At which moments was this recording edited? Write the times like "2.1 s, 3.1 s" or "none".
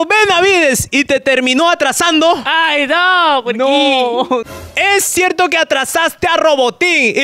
4.5 s